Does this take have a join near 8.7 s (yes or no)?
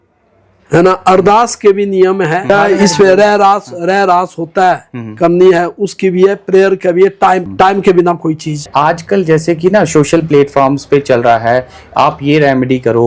yes